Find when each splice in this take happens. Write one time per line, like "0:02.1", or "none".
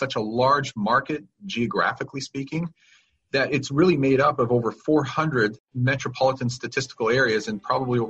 0:05.7